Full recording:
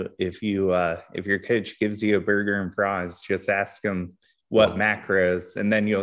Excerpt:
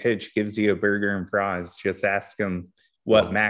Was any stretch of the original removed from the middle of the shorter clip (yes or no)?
no